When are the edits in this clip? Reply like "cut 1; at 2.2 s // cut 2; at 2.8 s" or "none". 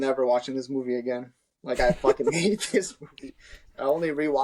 none